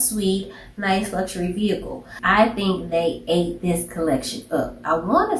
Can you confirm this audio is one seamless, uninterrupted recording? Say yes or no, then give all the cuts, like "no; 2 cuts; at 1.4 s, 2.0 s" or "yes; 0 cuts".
no; 1 cut; at 2.2 s